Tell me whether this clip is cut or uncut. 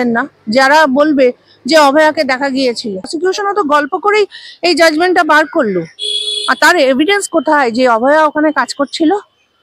cut